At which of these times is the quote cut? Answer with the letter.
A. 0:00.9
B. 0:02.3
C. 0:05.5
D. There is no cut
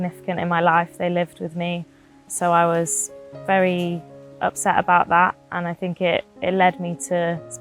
B